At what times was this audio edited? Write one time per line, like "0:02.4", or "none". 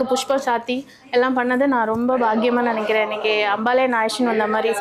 none